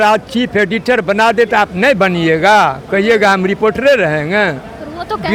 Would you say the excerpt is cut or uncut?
uncut